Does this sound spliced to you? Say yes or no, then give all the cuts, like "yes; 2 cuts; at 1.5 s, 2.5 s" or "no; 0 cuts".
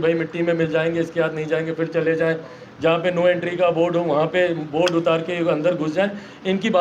no; 0 cuts